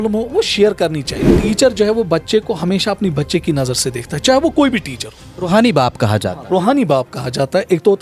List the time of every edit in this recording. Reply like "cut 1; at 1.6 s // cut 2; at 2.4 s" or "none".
cut 1; at 1.4 s

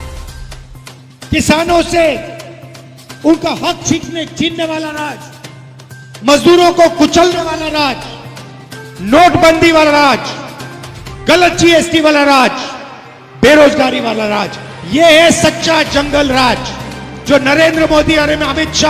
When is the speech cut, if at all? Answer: cut 1; at 1.3 s

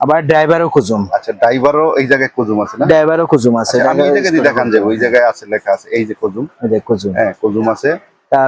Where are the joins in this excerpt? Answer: none

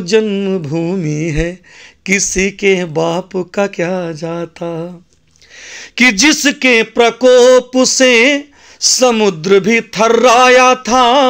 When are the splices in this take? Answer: none

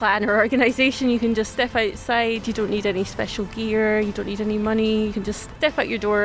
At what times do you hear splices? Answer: cut 1; at 5.2 s

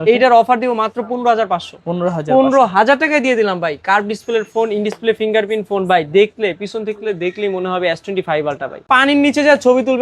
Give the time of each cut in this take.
cut 1; at 8.8 s

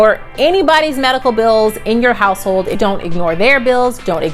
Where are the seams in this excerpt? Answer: cut 1; at 2.7 s

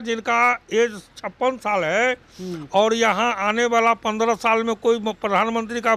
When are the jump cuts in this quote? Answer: none

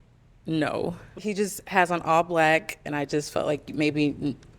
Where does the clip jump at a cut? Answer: cut 1; at 1.1 s

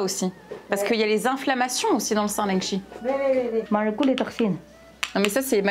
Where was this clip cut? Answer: cut 1; at 3.6 s

